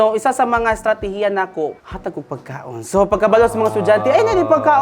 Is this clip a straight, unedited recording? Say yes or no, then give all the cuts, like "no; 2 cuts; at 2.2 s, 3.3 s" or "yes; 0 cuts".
no; 1 cut; at 1.8 s